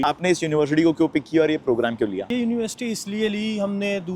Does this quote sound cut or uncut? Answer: uncut